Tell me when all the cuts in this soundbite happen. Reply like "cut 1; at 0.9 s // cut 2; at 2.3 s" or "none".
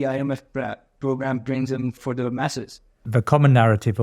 cut 1; at 2.0 s // cut 2; at 3.1 s

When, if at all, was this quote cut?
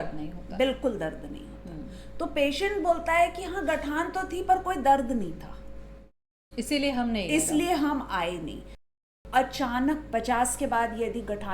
cut 1; at 9.0 s

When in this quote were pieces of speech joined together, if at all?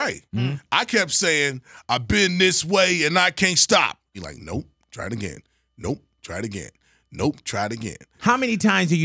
cut 1; at 4.2 s // cut 2; at 8.1 s

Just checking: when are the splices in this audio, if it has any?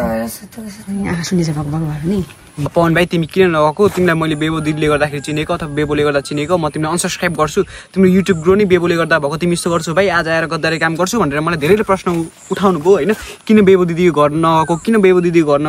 cut 1; at 2.7 s

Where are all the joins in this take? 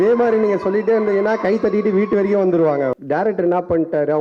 cut 1; at 3.0 s

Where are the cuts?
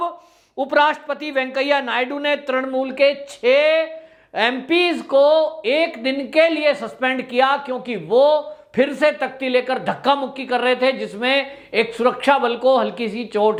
none

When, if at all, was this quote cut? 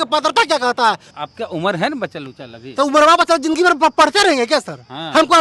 cut 1; at 1.1 s

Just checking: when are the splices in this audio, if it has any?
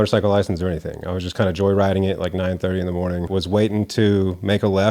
cut 1; at 3.3 s

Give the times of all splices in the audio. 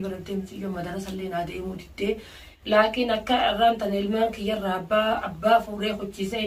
cut 1; at 2.5 s

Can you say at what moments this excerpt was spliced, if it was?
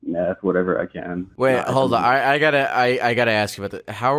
cut 1; at 1.2 s

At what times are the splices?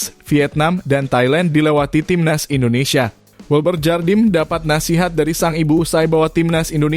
cut 1; at 3.3 s

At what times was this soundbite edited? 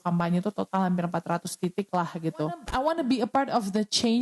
cut 1; at 2.7 s

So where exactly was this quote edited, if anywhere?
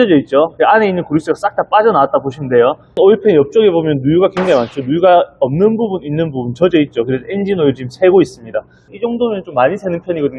cut 1; at 3.0 s // cut 2; at 8.9 s

